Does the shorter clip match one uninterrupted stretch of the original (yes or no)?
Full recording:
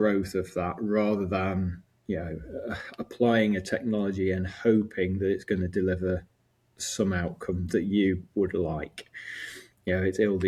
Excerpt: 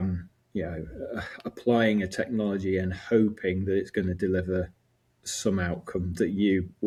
yes